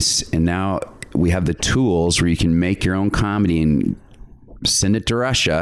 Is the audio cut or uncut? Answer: uncut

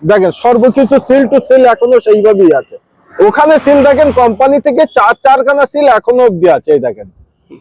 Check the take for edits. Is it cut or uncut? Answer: uncut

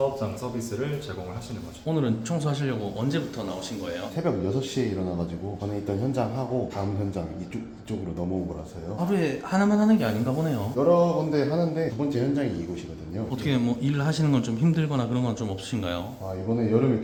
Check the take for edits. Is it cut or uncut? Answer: uncut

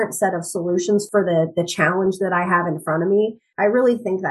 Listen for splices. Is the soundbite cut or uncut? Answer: cut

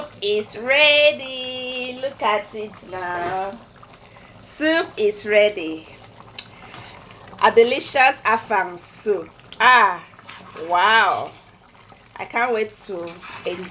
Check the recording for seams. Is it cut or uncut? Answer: uncut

